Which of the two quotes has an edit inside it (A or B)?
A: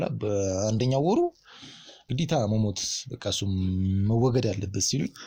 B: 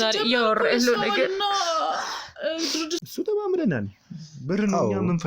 B